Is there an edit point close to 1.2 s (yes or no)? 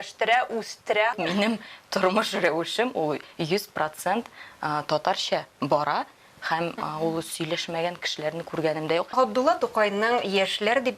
yes